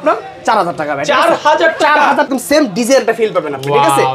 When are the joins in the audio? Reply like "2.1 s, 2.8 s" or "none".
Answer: 2.3 s

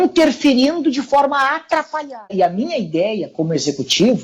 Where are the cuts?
2.3 s

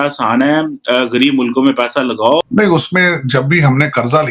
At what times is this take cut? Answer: 2.4 s

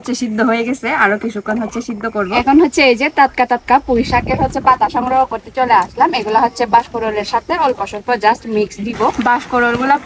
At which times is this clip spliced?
2.3 s, 9.2 s

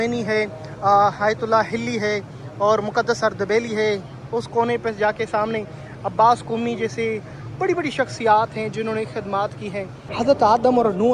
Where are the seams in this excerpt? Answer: 10.0 s

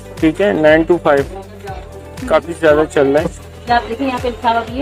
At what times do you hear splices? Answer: 3.5 s

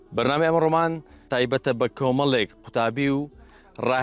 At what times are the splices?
1.1 s

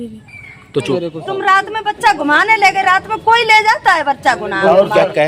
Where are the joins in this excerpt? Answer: 1.0 s

